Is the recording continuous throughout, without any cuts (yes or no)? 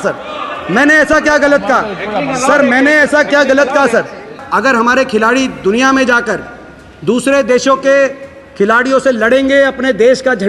no